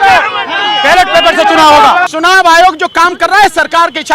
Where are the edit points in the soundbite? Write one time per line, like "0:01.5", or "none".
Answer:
0:02.1